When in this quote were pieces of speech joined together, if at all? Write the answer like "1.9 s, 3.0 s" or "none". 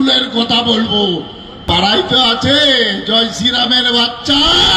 1.6 s